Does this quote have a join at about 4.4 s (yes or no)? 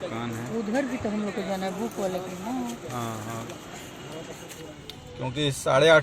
yes